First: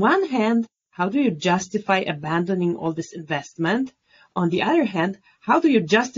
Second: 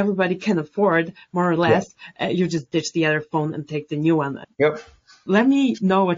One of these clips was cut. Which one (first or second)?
second